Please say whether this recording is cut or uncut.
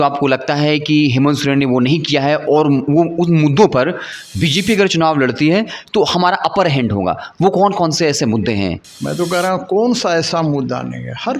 cut